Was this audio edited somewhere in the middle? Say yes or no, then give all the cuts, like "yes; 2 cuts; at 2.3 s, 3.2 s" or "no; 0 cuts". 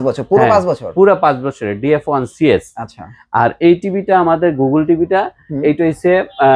no; 0 cuts